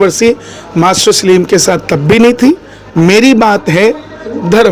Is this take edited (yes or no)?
yes